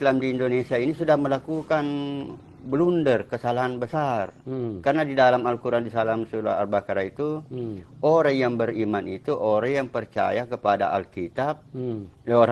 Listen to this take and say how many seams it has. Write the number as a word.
zero